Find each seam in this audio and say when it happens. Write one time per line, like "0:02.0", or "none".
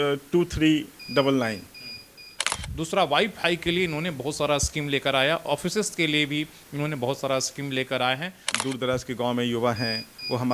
0:02.5
0:08.5

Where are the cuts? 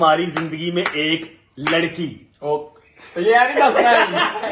none

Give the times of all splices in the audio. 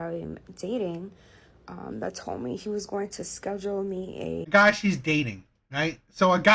none

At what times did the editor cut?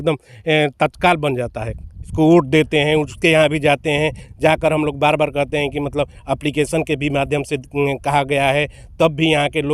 0:02.1

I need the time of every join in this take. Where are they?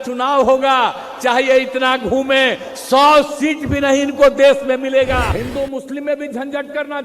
0:05.3

